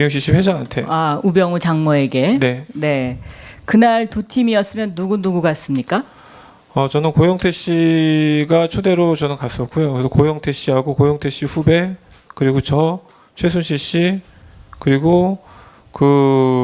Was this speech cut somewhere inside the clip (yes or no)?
no